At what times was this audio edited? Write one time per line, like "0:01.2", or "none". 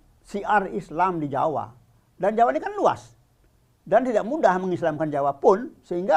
none